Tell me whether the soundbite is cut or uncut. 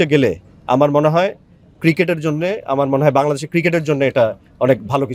uncut